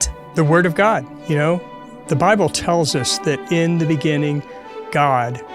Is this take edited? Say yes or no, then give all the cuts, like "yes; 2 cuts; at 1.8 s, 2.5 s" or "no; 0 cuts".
yes; 1 cut; at 1.1 s